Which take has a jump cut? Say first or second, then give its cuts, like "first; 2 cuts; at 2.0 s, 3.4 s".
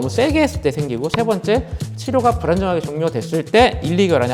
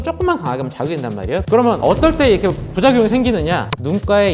second; 1 cut; at 1.4 s